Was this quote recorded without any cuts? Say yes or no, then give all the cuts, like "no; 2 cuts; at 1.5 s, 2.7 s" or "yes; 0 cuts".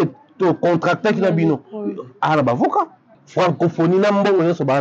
no; 1 cut; at 3.2 s